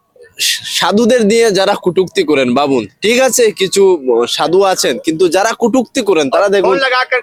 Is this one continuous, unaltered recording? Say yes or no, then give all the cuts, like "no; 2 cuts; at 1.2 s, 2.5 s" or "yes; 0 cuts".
yes; 0 cuts